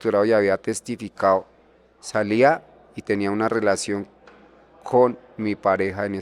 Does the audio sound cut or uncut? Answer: uncut